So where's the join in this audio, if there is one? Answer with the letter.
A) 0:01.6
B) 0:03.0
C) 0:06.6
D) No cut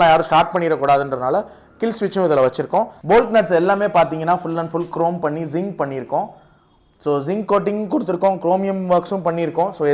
B